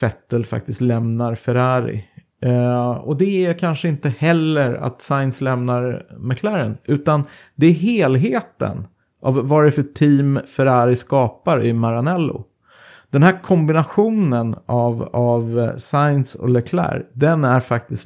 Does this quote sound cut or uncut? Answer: uncut